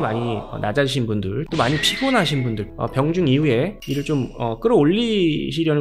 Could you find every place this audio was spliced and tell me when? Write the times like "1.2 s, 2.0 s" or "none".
1.5 s, 2.7 s